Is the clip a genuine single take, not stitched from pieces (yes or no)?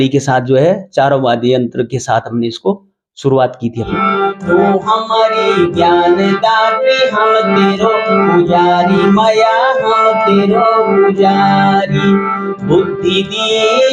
no